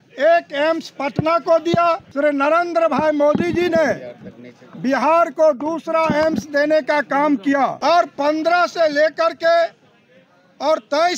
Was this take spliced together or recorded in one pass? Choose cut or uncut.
cut